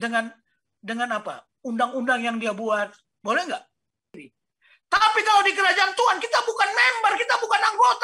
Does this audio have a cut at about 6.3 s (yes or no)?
no